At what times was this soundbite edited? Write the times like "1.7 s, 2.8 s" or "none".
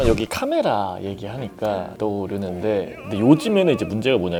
none